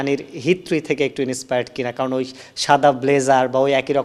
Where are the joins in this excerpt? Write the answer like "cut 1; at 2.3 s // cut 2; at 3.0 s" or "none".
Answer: none